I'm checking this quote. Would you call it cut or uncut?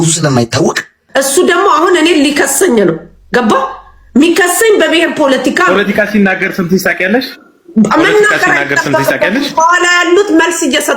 cut